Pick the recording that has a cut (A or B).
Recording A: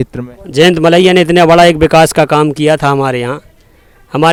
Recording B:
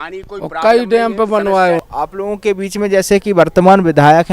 B